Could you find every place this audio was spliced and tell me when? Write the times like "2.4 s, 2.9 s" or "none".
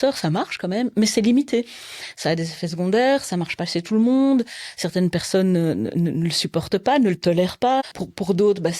7.8 s